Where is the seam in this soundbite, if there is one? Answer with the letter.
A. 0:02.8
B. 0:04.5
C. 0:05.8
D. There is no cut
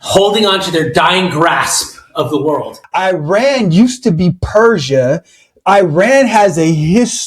A